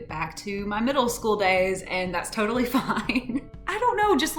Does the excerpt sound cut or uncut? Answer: cut